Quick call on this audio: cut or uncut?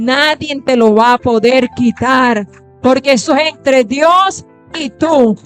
uncut